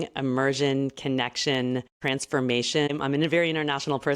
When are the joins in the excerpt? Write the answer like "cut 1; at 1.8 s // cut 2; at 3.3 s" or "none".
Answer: cut 1; at 2.0 s // cut 2; at 2.9 s